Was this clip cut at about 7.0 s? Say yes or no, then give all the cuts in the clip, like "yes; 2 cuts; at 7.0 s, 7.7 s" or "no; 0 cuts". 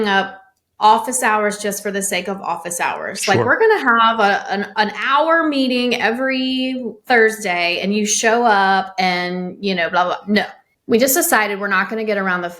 no; 1 cut; at 10.6 s